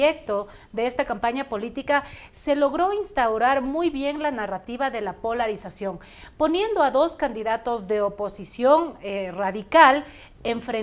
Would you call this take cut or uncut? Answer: uncut